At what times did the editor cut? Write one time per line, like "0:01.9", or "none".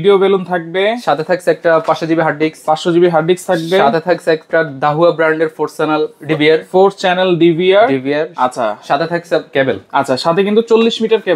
none